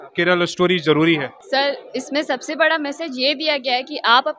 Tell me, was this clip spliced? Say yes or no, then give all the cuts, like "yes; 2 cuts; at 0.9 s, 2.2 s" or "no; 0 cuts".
yes; 1 cut; at 1.3 s